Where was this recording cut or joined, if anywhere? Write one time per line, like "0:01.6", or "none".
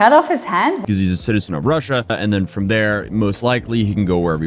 0:00.8
0:02.1